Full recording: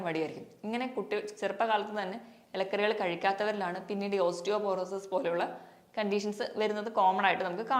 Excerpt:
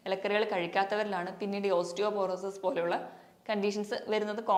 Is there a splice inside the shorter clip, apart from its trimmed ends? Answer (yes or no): no